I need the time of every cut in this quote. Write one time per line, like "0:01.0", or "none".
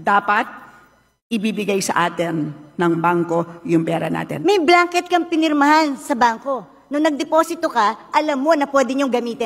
0:04.3